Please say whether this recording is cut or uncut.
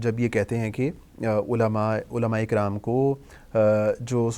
uncut